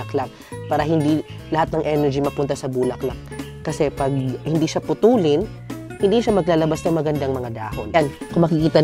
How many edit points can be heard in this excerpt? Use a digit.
1